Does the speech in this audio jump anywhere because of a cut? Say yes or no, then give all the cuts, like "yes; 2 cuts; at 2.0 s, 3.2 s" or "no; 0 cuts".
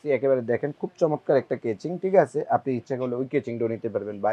no; 0 cuts